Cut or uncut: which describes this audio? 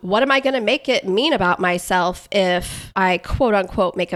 cut